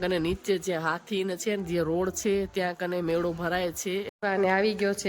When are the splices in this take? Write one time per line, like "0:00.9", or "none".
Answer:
0:04.1